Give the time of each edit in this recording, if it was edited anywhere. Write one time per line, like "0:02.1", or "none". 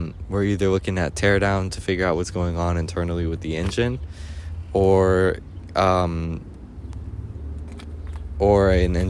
none

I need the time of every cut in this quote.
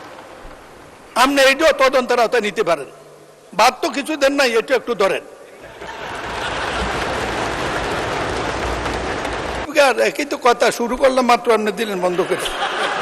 0:09.6

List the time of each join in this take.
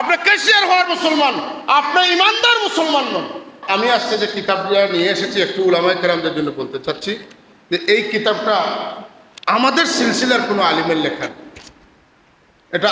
0:03.6

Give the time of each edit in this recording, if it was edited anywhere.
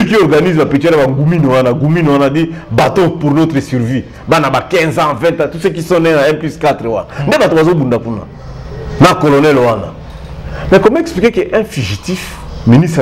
none

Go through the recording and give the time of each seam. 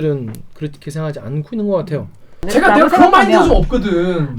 0:02.4

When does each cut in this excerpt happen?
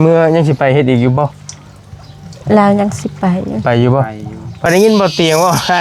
0:04.7

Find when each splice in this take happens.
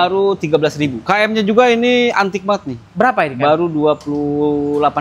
0:01.0

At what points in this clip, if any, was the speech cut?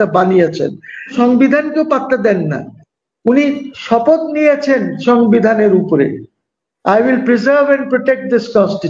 0:01.1

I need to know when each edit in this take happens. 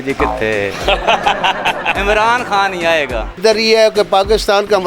0:03.3

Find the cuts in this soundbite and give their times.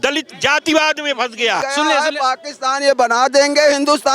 0:01.6

